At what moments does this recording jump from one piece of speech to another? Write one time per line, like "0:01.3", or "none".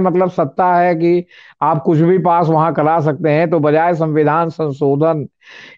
none